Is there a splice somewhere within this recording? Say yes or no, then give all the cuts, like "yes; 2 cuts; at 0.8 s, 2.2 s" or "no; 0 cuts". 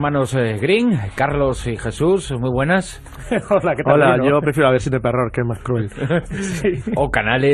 no; 0 cuts